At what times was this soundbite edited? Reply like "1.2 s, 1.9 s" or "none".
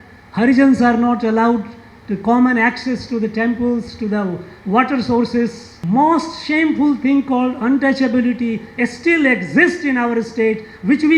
5.7 s